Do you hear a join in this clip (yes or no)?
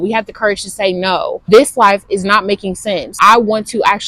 yes